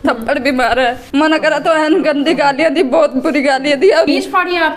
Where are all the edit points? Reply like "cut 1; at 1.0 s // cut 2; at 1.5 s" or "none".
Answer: cut 1; at 1.0 s // cut 2; at 4.1 s